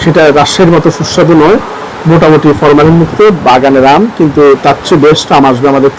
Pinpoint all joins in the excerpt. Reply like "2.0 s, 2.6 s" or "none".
none